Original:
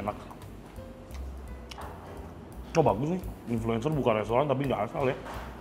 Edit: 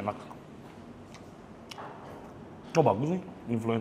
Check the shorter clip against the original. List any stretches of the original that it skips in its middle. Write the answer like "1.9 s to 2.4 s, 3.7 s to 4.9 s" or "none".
none